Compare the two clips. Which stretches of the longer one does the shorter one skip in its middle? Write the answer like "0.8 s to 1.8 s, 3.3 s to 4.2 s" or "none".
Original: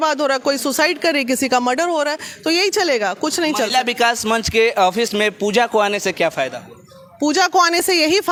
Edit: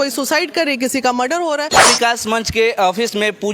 2.2 s to 3.7 s